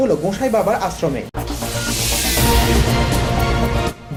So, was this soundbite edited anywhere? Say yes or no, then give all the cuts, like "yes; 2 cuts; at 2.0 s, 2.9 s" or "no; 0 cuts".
no; 0 cuts